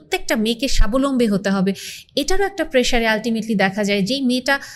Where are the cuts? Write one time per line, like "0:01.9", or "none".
none